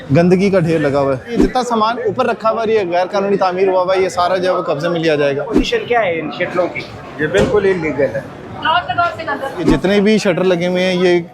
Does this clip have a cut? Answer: yes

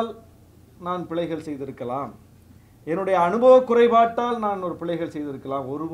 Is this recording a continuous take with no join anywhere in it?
yes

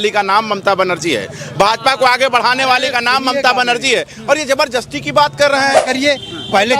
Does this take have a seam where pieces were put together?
yes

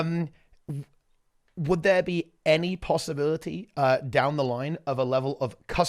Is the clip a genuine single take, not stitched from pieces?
yes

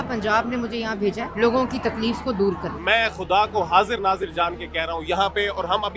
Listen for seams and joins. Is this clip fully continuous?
no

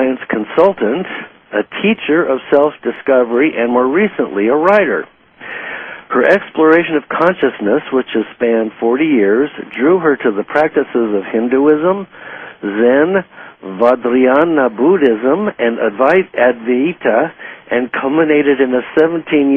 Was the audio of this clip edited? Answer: yes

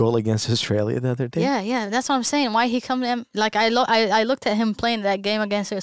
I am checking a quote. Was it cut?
no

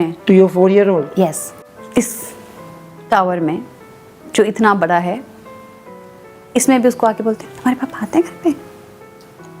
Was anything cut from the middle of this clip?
no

